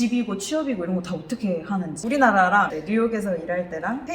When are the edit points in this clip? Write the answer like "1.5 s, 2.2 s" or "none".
2.0 s